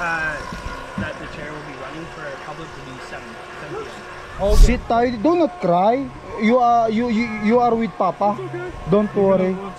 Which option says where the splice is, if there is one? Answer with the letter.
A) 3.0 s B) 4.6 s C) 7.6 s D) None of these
B